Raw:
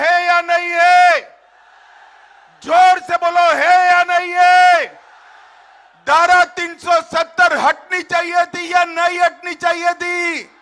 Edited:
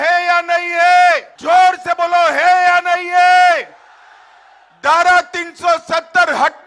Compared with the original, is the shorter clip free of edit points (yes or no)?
no